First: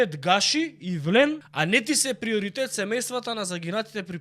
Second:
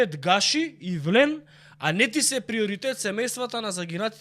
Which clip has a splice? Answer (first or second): first